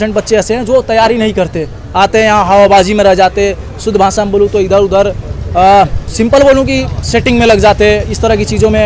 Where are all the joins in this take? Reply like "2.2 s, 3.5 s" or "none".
none